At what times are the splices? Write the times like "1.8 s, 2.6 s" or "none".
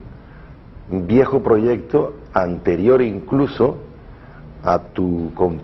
1.2 s

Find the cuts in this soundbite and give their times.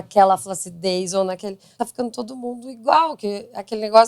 1.7 s

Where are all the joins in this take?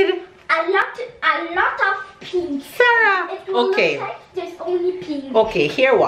none

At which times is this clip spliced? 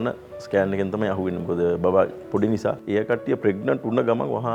2.8 s

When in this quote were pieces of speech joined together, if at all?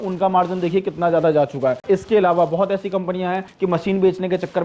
1.8 s, 3.5 s

